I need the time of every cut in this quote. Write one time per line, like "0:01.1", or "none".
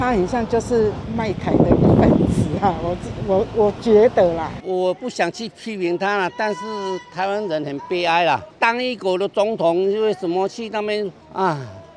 none